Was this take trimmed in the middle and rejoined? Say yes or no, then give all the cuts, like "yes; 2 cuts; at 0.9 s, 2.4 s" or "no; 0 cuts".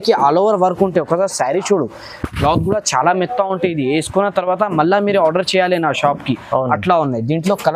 no; 0 cuts